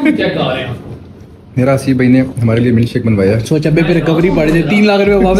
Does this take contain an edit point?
no; 0 cuts

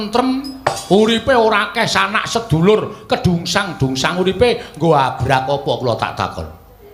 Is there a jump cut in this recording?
no; 0 cuts

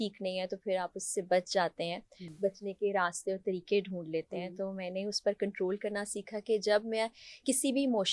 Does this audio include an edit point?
no; 0 cuts

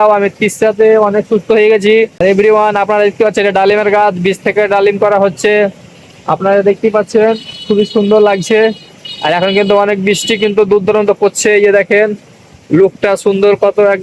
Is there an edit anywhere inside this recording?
yes; 1 cut; at 2.1 s

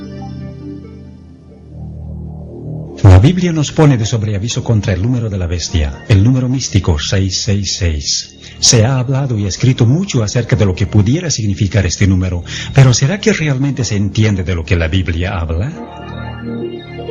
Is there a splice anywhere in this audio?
no; 0 cuts

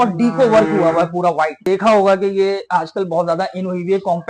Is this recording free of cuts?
no; 1 cut; at 1.6 s

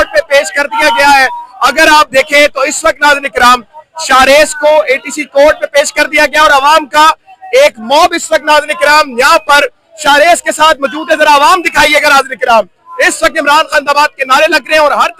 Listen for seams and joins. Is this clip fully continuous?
yes; 0 cuts

